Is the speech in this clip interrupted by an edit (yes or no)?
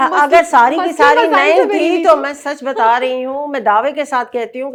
no